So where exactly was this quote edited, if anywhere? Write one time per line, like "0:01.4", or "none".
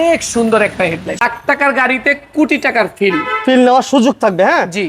0:01.2

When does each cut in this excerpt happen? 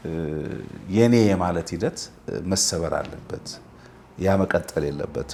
none

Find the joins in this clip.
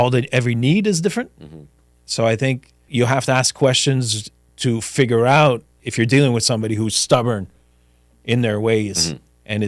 0:02.7
0:05.8

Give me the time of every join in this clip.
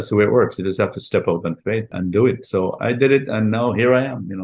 0:01.9

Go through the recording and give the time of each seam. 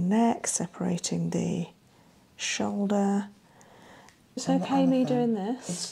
0:04.4

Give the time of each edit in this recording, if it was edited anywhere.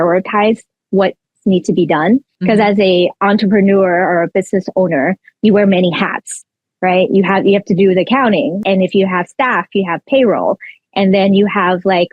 0:02.3
0:08.6

